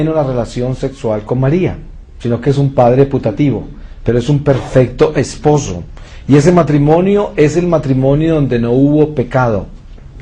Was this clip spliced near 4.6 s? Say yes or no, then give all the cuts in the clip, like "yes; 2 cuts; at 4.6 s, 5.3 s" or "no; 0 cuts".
yes; 1 cut; at 4.6 s